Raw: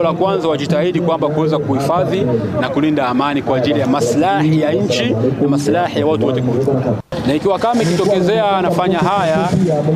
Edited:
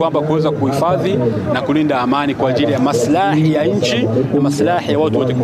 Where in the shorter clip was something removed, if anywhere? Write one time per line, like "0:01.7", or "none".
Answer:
none